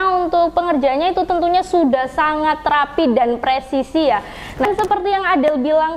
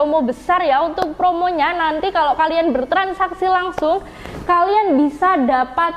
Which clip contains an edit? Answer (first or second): first